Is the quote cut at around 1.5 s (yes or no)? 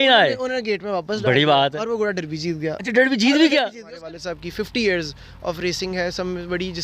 no